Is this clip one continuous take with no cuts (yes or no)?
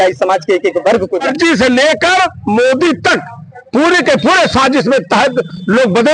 no